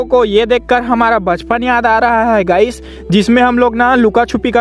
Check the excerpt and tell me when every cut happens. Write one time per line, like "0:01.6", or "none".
none